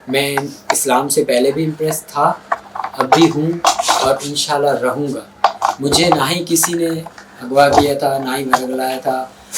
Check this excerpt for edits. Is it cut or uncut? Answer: uncut